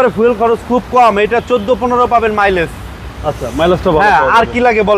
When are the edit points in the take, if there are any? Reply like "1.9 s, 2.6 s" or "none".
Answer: none